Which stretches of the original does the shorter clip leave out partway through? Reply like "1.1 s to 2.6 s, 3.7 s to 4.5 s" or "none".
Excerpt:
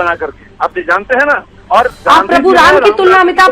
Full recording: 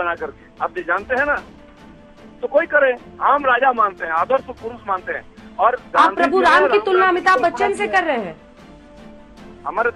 1.5 s to 5.4 s